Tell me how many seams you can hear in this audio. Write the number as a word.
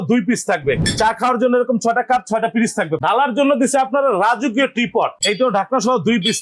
three